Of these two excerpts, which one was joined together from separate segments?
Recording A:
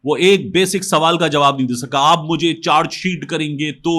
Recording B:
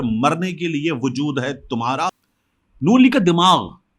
B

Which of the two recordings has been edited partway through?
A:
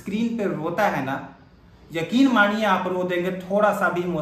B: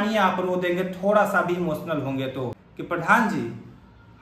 B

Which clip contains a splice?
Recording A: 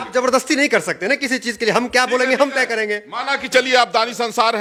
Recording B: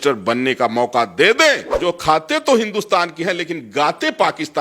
B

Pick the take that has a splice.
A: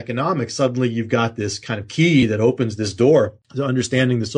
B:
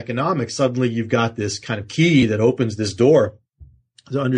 A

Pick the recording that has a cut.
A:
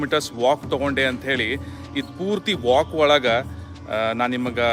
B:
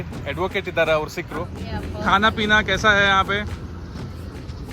B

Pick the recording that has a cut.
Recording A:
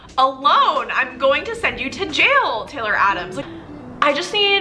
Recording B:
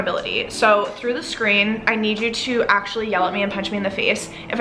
A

